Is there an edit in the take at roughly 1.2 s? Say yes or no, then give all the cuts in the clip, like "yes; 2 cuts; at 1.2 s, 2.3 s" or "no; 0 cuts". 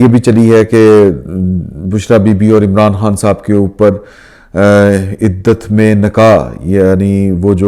no; 0 cuts